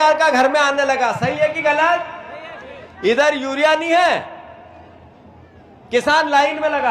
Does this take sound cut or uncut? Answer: uncut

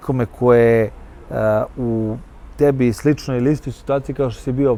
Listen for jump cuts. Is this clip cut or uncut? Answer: uncut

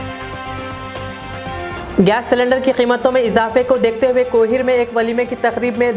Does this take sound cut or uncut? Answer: uncut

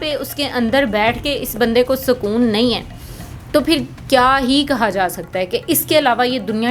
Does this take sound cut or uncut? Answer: uncut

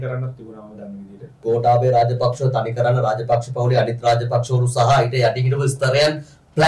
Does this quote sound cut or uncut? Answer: cut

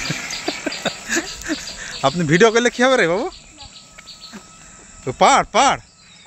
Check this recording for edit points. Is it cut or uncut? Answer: uncut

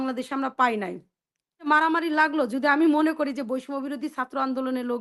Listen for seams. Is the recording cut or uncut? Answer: cut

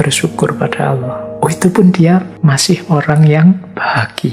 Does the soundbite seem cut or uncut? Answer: cut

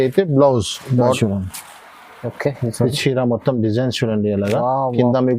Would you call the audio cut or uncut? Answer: cut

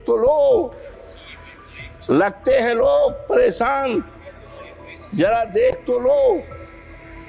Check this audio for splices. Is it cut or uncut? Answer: uncut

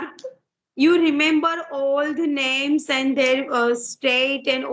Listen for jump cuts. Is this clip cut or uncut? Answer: uncut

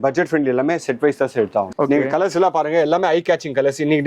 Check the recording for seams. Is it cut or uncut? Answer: cut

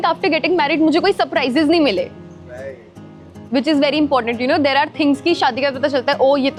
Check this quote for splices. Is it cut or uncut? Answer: uncut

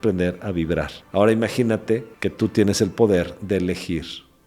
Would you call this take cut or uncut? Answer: cut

